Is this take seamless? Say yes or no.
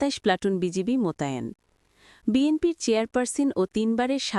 yes